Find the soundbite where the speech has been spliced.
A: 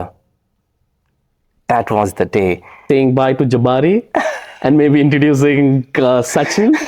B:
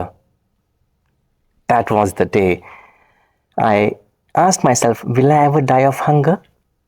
A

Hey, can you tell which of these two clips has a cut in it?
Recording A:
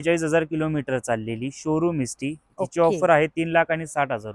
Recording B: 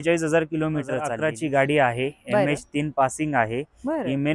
B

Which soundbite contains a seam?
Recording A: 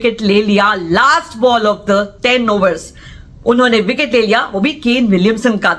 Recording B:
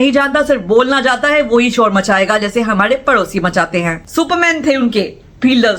B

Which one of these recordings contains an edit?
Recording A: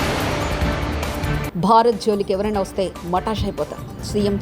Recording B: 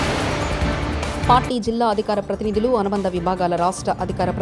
A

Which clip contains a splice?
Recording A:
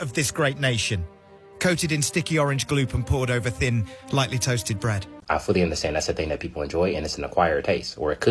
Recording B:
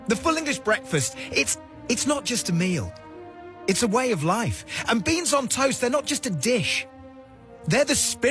A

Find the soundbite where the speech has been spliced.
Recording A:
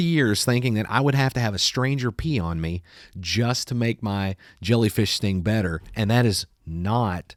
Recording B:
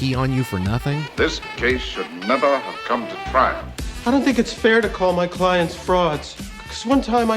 B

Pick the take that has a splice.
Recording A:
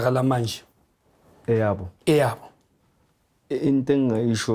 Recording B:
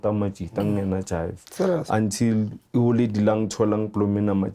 B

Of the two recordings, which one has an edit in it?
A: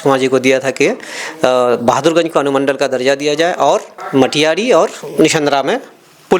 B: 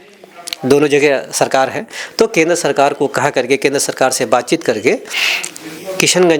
A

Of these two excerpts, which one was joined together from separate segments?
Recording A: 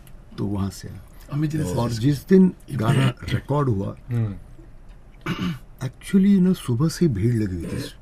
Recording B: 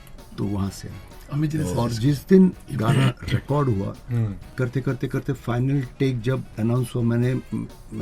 B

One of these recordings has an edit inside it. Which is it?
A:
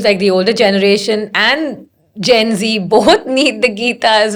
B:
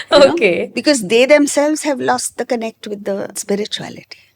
B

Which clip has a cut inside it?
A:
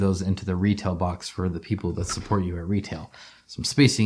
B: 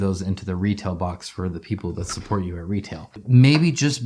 B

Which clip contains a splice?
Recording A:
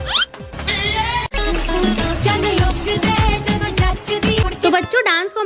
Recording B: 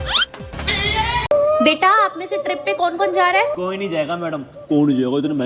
B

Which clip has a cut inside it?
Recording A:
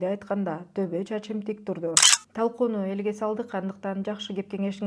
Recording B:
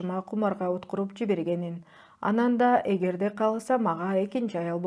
A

